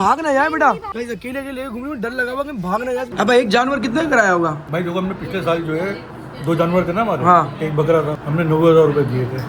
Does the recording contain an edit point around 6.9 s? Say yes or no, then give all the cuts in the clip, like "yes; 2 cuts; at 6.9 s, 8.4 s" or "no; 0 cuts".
no; 2 cuts; at 3.1 s, 4.6 s